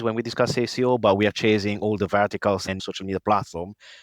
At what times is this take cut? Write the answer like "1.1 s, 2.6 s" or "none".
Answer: 2.6 s